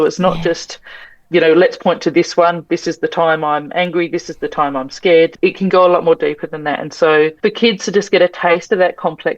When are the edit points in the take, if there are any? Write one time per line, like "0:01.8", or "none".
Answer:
0:05.3
0:07.3